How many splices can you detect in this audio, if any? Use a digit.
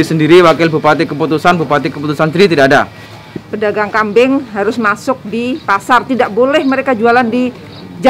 1